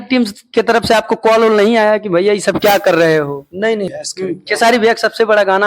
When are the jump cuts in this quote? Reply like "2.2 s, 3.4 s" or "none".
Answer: 4.0 s